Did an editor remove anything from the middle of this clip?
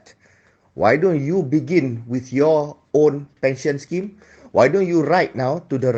no; 0 cuts

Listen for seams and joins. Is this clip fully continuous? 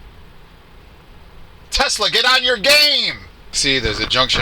no; 1 cut; at 3.5 s

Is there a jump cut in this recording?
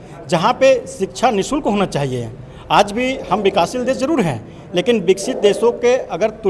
no; 0 cuts

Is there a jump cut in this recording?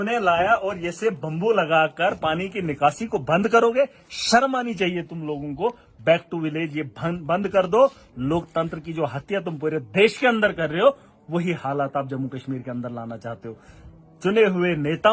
no; 0 cuts

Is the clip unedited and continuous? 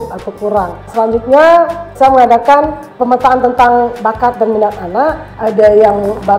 no; 4 cuts; at 0.8 s, 1.9 s, 2.9 s, 5.3 s

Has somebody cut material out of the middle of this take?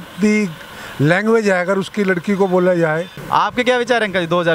yes; 1 cut; at 3.1 s

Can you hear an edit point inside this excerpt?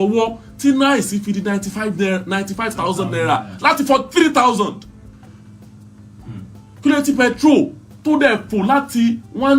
no; 0 cuts

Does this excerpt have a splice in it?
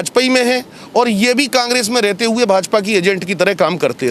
no; 0 cuts

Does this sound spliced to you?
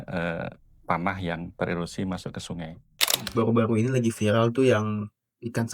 yes; 1 cut; at 3.2 s

